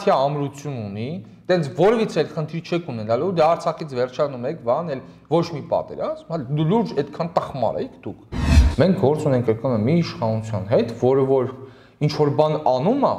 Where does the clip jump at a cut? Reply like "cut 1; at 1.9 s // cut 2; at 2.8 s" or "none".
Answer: cut 1; at 8.5 s